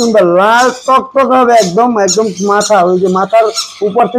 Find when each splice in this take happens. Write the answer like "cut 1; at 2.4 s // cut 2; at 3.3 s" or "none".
none